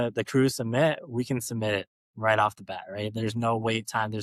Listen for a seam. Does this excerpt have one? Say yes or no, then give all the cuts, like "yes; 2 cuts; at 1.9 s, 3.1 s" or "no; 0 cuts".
no; 0 cuts